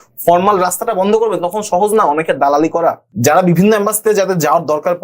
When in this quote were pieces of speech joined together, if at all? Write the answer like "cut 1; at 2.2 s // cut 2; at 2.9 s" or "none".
cut 1; at 3.1 s